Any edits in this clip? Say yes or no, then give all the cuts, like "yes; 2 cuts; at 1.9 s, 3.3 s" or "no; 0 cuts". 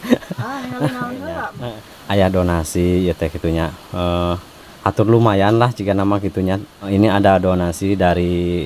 yes; 2 cuts; at 1.5 s, 6.9 s